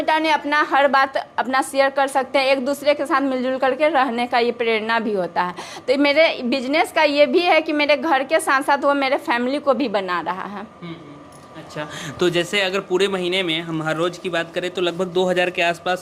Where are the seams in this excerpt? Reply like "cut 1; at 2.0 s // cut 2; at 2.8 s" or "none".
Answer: none